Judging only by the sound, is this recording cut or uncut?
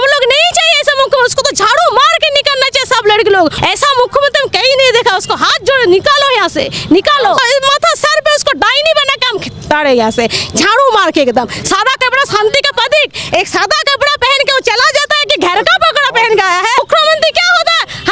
cut